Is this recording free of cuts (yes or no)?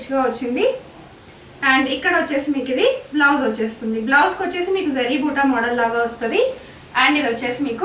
yes